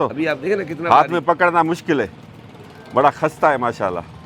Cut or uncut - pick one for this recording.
uncut